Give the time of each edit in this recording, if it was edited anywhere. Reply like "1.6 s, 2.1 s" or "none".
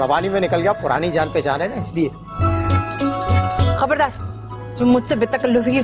none